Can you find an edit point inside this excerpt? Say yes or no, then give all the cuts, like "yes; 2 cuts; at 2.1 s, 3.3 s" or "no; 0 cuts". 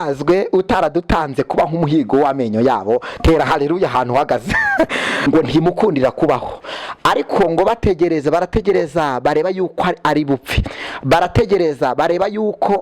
yes; 1 cut; at 5.1 s